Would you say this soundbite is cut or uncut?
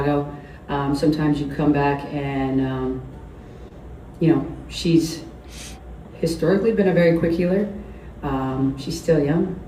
uncut